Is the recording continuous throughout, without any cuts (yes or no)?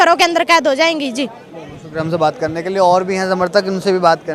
yes